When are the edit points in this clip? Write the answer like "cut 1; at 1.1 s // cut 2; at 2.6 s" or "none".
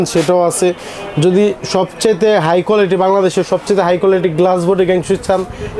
none